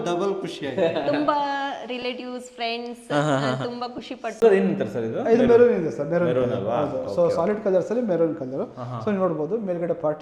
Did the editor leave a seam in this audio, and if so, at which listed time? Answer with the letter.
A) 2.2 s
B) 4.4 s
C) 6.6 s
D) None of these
B